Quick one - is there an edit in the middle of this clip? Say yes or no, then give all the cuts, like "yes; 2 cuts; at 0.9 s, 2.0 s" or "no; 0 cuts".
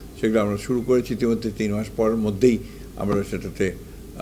no; 0 cuts